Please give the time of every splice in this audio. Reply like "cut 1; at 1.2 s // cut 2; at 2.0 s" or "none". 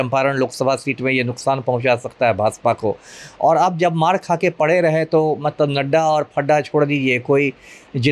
none